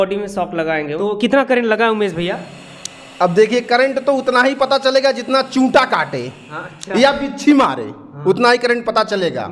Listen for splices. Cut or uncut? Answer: cut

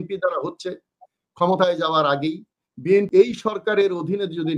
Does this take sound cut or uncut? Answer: cut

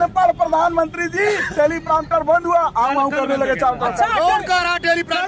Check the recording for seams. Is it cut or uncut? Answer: uncut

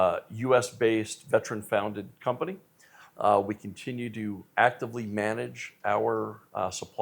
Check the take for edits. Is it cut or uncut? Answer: uncut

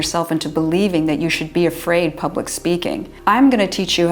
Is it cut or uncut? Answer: uncut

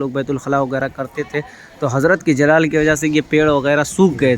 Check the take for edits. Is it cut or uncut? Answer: uncut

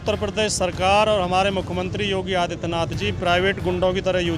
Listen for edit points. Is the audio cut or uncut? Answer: uncut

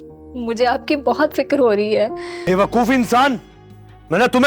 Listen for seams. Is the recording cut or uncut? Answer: cut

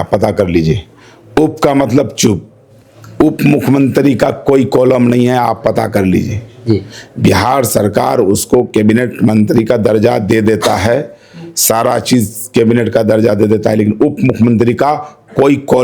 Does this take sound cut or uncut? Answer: uncut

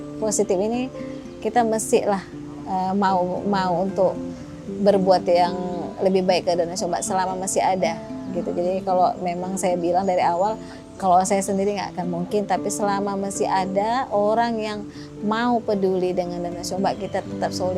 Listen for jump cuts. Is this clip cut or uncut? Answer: uncut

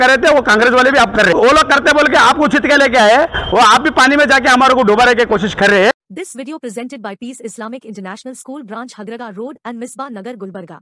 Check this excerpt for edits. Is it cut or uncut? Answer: cut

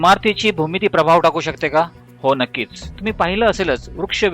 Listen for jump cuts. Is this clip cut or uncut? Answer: cut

